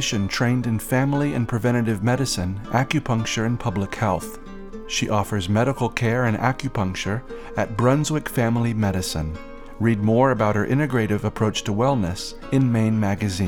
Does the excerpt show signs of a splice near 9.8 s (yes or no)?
no